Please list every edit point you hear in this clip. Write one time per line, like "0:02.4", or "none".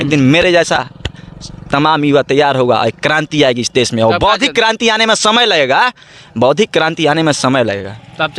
none